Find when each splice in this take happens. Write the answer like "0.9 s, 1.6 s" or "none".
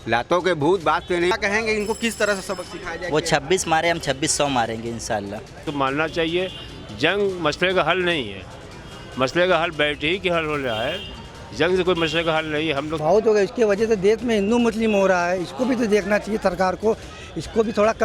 1.3 s, 5.6 s, 12.9 s